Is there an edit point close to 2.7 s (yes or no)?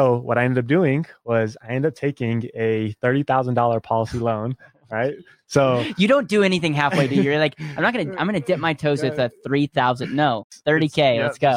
no